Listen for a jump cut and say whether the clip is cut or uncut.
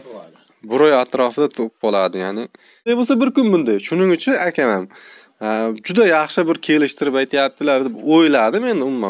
cut